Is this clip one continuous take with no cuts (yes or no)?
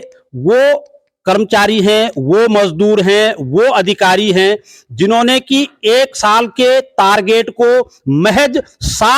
yes